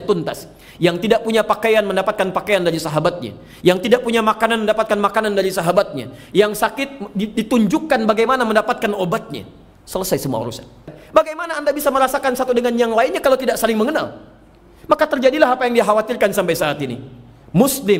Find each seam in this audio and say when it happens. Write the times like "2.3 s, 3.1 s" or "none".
11.0 s

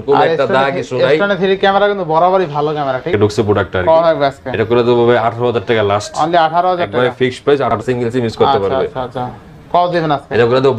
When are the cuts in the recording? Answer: 3.1 s, 7.8 s

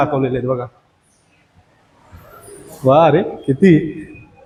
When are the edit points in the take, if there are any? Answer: none

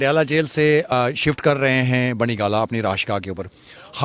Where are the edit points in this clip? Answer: 0.9 s

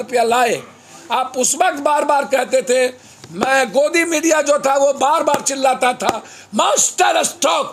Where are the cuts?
none

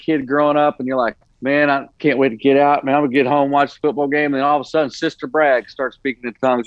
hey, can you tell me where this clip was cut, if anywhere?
1.3 s, 1.9 s

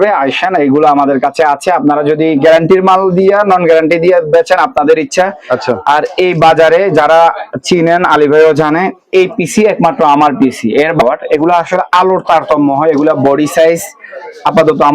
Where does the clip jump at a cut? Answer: 11.0 s

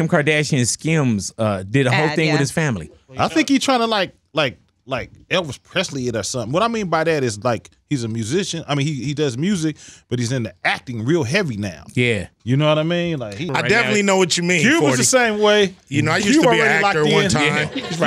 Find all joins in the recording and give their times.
13.5 s

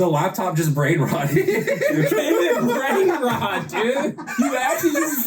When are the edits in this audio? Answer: 2.0 s, 4.3 s

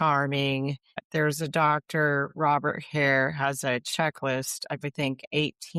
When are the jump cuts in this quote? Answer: 0.9 s

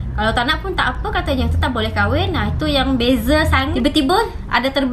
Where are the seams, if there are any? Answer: 3.7 s

